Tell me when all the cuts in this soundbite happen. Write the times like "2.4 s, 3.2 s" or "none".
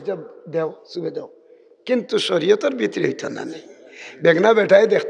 none